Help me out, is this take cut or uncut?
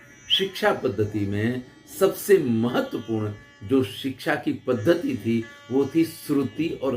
uncut